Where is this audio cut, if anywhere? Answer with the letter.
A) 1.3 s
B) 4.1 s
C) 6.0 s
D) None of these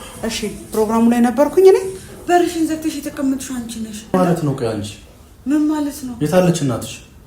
B